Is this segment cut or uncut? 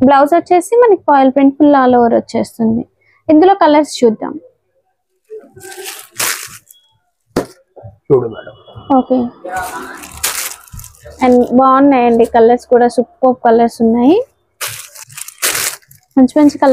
uncut